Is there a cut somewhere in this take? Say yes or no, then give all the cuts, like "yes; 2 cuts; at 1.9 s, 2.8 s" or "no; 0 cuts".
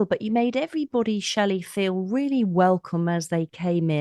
no; 0 cuts